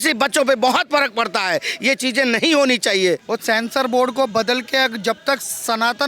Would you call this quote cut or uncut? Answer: cut